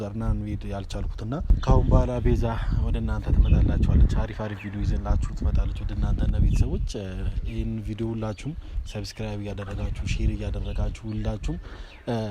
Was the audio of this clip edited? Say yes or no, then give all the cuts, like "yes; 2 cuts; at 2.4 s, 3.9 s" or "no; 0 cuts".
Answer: yes; 1 cut; at 1.6 s